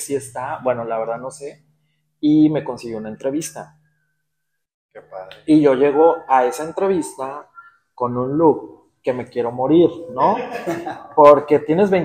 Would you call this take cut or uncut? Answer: uncut